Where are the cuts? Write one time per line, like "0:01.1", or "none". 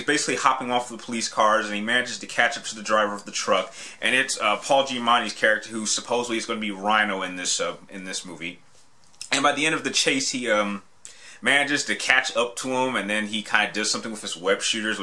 0:01.0